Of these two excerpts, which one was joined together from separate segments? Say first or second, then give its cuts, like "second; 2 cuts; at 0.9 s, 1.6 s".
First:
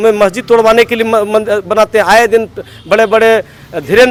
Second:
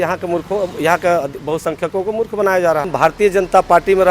second; 1 cut; at 2.9 s